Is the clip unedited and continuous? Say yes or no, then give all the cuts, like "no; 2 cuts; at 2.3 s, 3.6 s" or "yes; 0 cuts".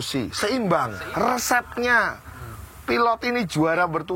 no; 1 cut; at 1.0 s